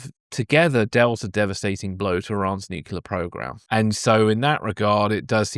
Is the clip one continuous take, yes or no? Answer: yes